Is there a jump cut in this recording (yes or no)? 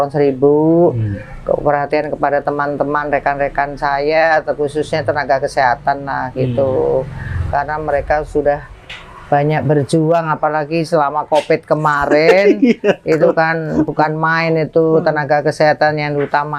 no